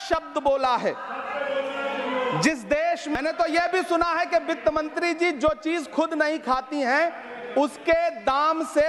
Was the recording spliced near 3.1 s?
yes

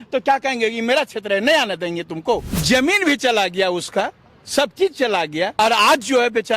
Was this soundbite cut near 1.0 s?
no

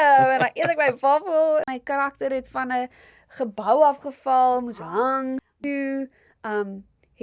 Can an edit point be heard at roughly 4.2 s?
no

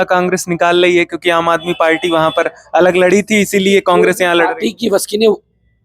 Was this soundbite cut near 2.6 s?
no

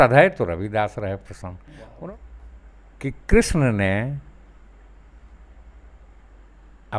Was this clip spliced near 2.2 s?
yes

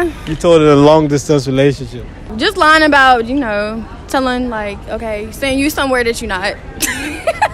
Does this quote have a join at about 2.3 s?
yes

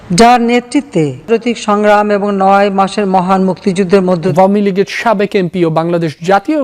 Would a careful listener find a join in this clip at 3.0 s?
no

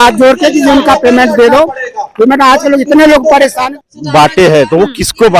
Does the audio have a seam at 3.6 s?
yes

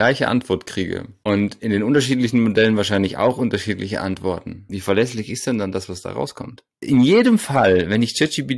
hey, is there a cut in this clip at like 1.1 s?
no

